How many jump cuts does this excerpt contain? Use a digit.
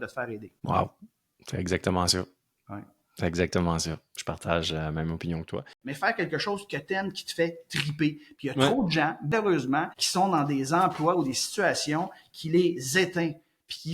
1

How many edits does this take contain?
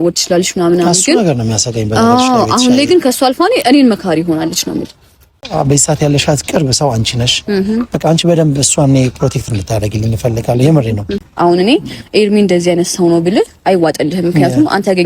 2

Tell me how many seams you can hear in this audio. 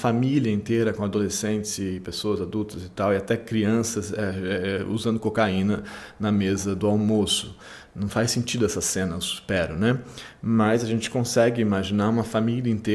0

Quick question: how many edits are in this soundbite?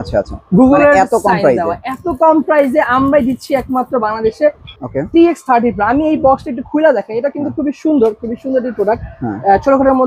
1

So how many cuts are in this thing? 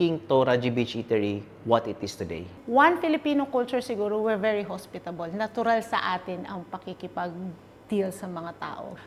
0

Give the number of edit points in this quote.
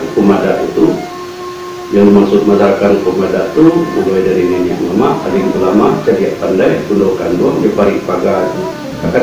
0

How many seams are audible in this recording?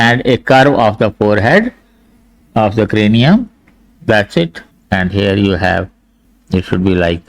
1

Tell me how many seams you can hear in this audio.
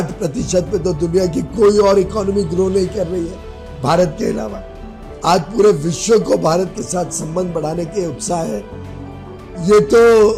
0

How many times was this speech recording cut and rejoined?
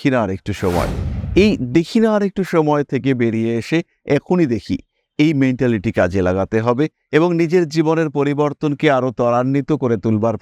0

